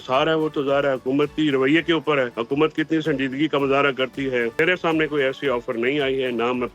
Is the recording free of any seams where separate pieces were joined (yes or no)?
no